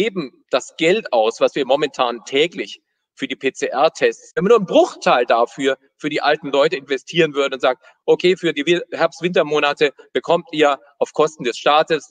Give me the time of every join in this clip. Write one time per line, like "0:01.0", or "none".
0:04.3